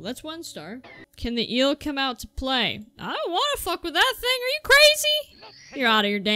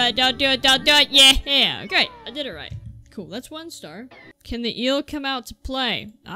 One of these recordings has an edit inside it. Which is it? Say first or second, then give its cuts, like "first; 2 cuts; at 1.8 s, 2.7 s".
second; 1 cut; at 1.9 s